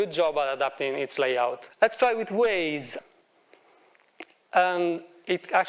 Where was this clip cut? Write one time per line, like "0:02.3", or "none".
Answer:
0:01.6
0:02.9